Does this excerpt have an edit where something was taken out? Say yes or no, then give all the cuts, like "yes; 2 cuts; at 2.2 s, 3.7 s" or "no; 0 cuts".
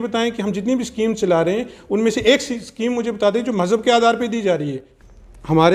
yes; 1 cut; at 4.8 s